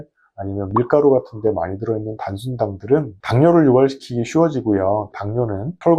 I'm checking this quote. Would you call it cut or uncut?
uncut